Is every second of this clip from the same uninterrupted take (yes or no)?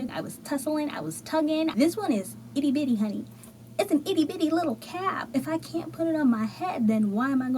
no